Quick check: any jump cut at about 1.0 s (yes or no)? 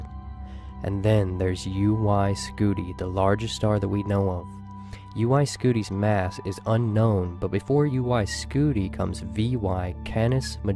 yes